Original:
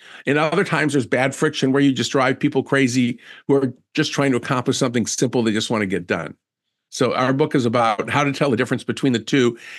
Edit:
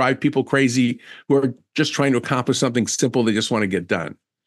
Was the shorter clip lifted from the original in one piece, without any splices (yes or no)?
yes